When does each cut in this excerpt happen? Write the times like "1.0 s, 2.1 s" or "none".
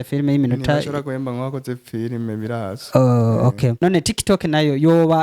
3.8 s